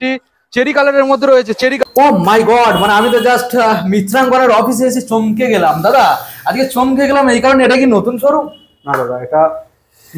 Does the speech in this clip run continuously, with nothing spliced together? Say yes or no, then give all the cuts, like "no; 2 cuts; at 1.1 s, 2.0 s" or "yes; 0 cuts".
no; 1 cut; at 1.8 s